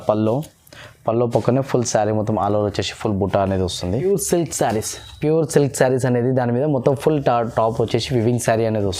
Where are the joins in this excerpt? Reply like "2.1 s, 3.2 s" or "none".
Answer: 4.0 s